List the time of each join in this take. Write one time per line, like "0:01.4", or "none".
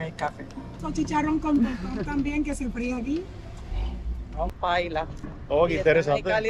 0:00.8
0:04.5